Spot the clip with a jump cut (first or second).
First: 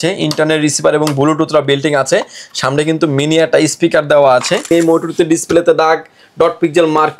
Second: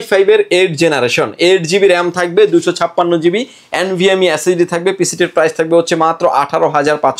first